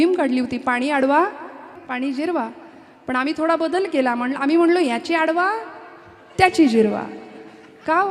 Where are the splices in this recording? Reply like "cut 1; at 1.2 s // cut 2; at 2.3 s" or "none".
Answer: cut 1; at 1.7 s